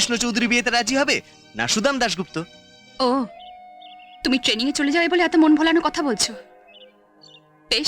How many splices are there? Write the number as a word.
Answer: zero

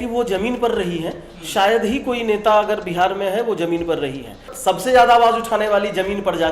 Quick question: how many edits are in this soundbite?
one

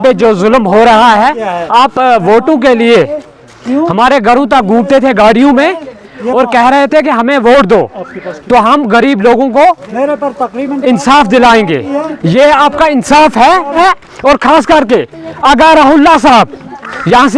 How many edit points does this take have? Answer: one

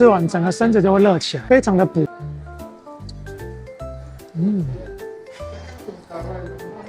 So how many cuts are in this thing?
zero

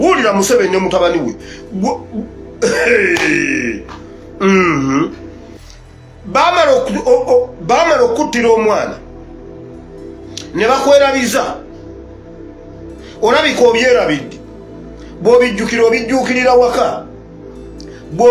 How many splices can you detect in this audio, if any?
two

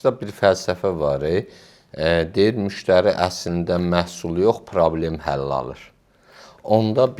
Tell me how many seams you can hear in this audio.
zero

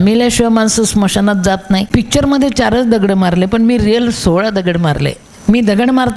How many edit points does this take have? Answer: one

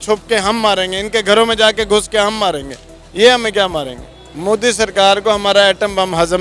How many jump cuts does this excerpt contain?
one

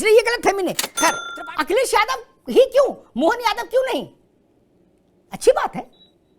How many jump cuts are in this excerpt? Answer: one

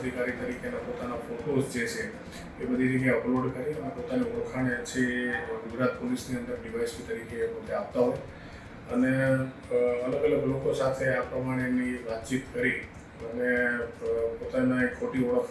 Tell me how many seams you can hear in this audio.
zero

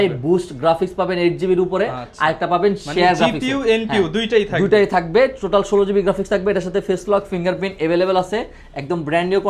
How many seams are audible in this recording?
zero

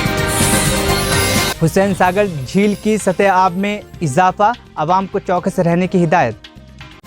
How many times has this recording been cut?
one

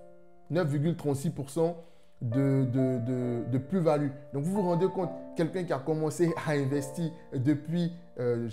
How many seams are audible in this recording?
zero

